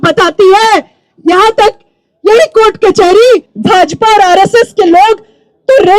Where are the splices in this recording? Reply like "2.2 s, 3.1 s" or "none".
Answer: 3.5 s